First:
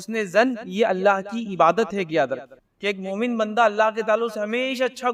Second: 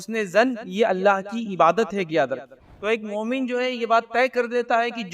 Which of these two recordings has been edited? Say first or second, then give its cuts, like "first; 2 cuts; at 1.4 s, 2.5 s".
second; 1 cut; at 2.6 s